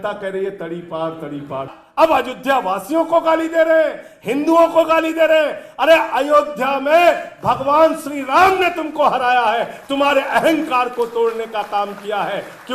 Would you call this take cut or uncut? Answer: cut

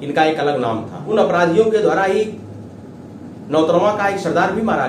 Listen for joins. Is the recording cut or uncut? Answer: cut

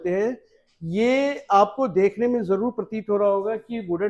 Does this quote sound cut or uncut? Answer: uncut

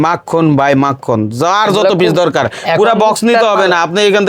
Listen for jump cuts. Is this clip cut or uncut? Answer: uncut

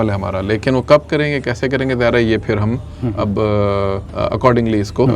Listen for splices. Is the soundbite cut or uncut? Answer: cut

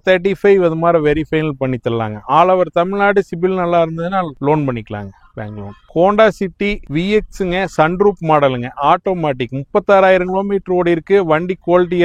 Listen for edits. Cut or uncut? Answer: uncut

